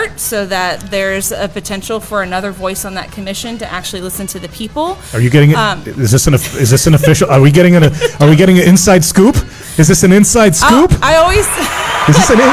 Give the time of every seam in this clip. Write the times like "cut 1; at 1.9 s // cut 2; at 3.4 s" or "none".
none